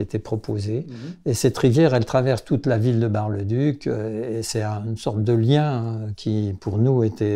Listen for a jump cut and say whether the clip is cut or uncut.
uncut